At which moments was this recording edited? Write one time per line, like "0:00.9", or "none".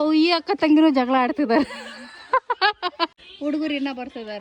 0:03.2